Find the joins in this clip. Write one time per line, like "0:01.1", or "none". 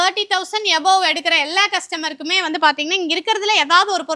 none